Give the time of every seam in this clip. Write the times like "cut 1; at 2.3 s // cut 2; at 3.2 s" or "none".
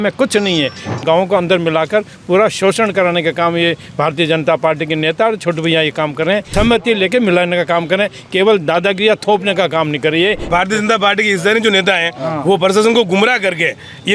cut 1; at 1.0 s // cut 2; at 6.5 s // cut 3; at 10.4 s